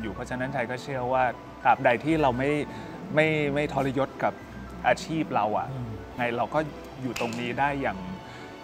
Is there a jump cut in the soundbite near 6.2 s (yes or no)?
yes